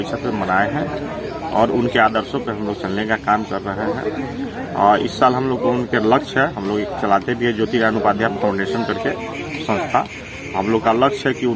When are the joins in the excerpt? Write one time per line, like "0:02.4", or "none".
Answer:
none